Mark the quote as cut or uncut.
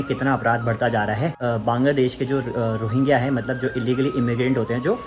cut